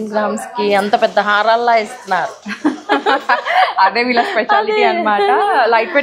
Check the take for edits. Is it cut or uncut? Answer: uncut